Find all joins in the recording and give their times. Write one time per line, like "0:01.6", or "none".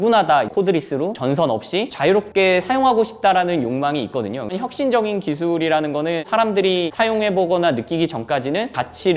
none